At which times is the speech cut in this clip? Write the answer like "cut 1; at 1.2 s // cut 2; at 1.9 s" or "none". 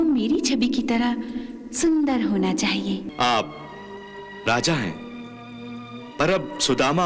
cut 1; at 3.1 s

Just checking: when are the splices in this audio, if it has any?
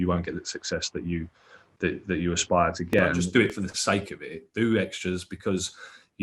cut 1; at 3.2 s

